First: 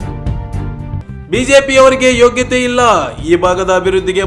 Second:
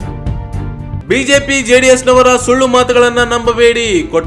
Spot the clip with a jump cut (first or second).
first